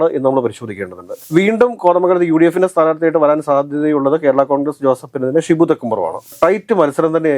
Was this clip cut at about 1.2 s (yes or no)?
yes